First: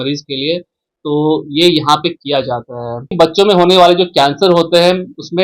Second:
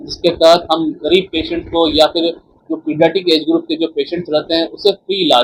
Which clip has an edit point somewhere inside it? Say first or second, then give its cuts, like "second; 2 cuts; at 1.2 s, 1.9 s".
first; 1 cut; at 3.1 s